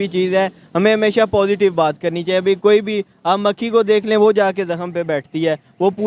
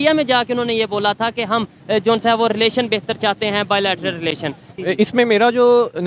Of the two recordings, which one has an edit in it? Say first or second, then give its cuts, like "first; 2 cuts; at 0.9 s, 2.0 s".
second; 1 cut; at 4.7 s